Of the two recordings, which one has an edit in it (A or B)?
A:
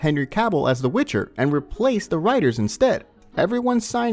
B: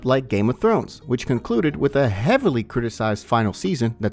A